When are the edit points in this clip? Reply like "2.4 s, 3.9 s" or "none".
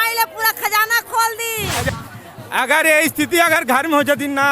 1.7 s

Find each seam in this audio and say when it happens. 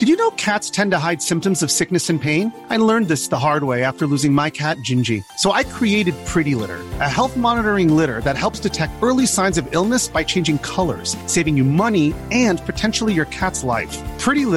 none

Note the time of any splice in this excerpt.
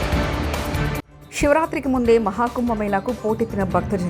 1.1 s

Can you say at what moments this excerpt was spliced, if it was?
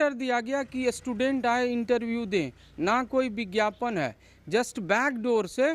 none

